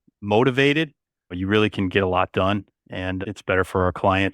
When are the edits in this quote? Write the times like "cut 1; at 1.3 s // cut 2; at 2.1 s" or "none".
cut 1; at 1.3 s // cut 2; at 3.2 s

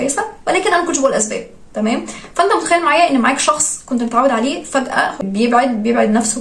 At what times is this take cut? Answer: none

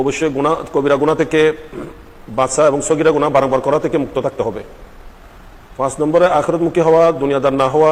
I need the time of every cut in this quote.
none

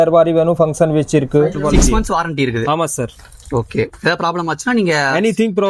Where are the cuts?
cut 1; at 1.6 s

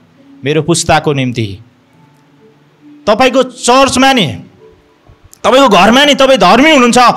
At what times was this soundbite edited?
none

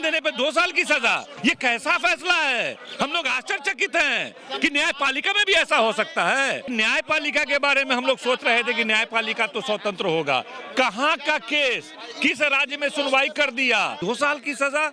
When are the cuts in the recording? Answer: cut 1; at 1.3 s // cut 2; at 6.7 s // cut 3; at 14.0 s

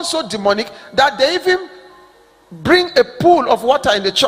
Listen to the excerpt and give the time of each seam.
none

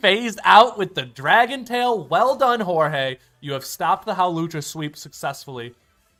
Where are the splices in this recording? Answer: none

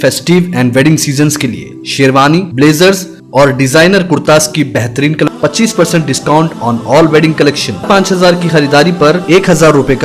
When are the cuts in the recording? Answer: cut 1; at 5.3 s // cut 2; at 7.8 s

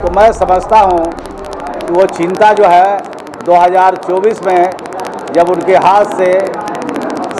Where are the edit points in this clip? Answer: none

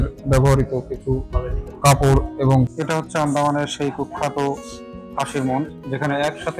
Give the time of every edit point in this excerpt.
cut 1; at 2.7 s

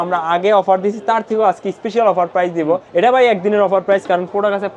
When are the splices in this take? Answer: cut 1; at 2.9 s

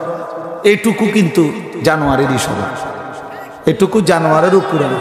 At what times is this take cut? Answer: none

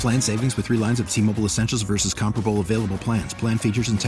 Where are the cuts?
none

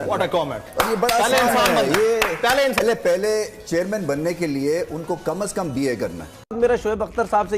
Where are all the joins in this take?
cut 1; at 2.8 s // cut 2; at 6.5 s

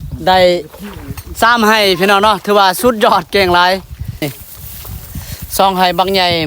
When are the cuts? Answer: cut 1; at 4.2 s

